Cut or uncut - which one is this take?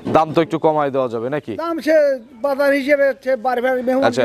uncut